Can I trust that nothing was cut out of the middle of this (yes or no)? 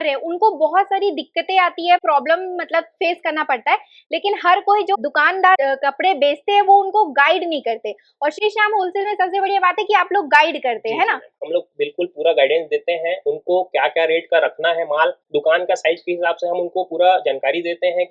yes